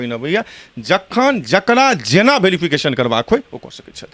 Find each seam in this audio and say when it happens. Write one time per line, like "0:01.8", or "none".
none